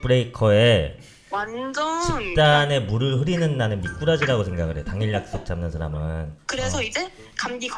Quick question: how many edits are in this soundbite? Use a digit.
1